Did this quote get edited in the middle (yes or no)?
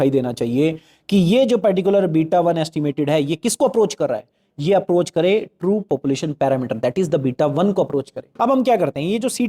yes